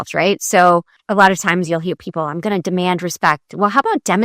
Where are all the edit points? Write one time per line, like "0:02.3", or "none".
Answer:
0:01.0